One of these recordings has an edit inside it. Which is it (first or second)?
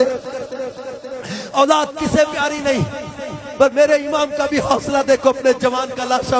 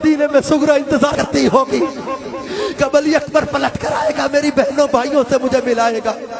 second